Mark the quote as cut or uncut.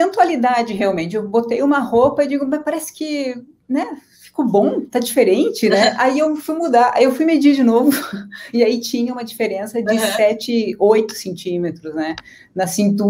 uncut